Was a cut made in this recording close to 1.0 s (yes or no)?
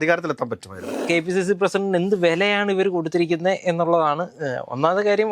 yes